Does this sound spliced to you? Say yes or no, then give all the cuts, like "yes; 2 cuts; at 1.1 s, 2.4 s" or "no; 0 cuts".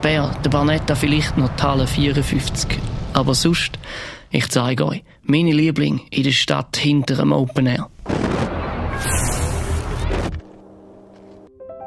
yes; 1 cut; at 10.9 s